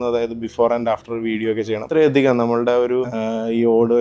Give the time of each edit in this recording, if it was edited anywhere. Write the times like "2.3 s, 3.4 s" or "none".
1.8 s, 3.1 s